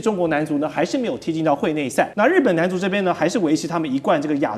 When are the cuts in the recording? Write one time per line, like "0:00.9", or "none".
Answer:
0:02.1